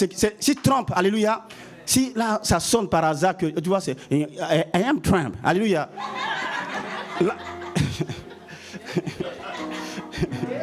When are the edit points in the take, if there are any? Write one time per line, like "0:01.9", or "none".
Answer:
none